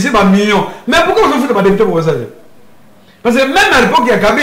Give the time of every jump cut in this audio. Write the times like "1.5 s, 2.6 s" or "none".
none